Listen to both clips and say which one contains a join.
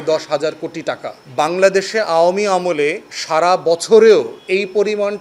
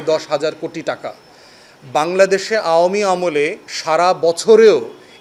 first; 2 cuts; at 1.1 s, 4.4 s

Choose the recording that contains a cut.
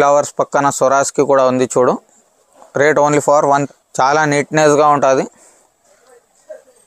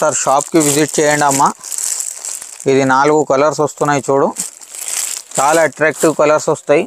first; 1 cut; at 3.6 s

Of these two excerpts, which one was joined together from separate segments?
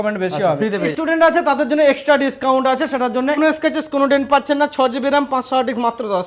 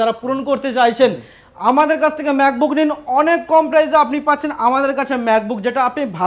first; 2 cuts; at 0.9 s, 3.4 s

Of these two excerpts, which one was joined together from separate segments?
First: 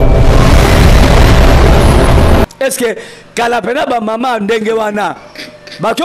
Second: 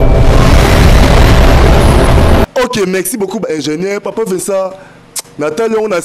first; 1 cut; at 2.5 s

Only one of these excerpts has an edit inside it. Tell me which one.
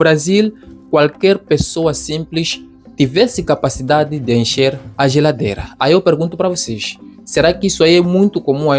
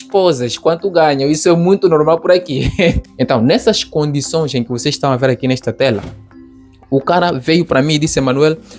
second; 1 cut; at 3.0 s

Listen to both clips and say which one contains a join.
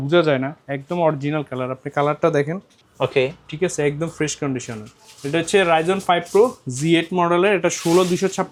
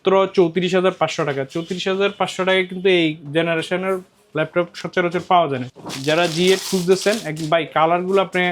second; 1 cut; at 5.7 s

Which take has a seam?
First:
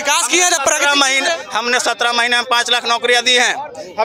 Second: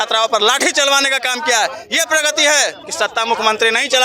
second; 1 cut; at 2.8 s

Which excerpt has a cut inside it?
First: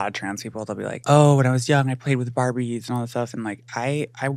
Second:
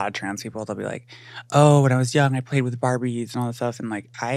first; 1 cut; at 1.0 s

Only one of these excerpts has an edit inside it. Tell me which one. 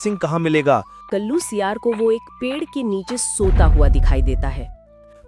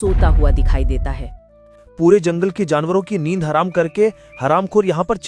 first; 1 cut; at 1.0 s

